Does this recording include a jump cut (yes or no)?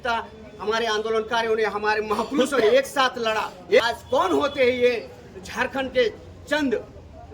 yes